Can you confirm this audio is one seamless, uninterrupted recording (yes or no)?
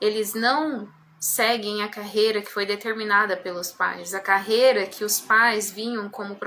yes